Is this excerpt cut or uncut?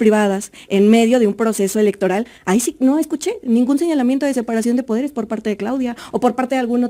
uncut